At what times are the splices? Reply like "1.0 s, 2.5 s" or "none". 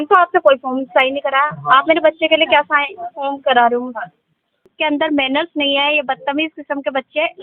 4.7 s